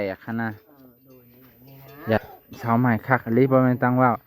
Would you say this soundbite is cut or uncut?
cut